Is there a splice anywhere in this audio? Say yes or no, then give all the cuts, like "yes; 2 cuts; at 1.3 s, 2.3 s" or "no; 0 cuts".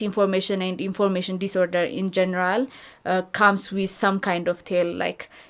no; 0 cuts